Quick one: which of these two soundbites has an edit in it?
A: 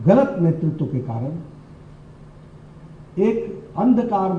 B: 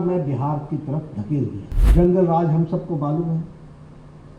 B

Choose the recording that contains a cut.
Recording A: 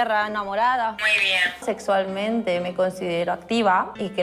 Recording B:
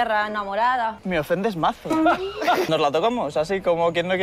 B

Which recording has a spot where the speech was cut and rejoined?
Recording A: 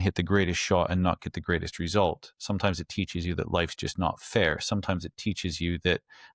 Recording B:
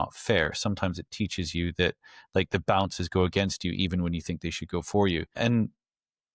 B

